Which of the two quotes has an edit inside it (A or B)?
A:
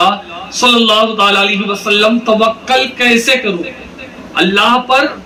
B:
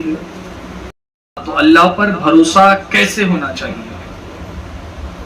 B